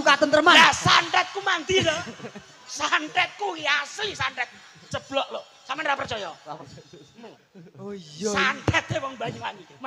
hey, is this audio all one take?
yes; 0 cuts

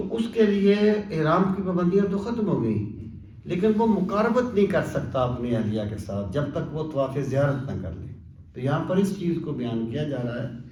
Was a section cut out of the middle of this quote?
no; 0 cuts

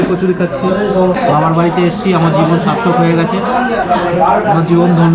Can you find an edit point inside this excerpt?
yes; 2 cuts; at 1.1 s, 3.8 s

